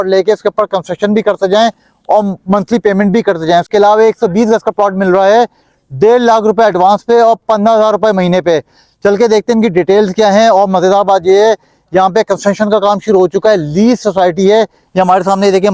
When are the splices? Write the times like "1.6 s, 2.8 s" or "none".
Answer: none